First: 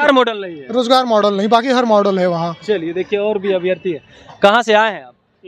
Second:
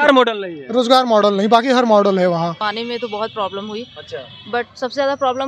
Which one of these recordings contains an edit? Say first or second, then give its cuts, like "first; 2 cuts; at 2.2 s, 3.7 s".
second; 1 cut; at 2.6 s